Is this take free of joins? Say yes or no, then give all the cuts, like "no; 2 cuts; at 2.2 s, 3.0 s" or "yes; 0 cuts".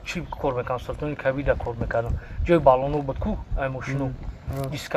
yes; 0 cuts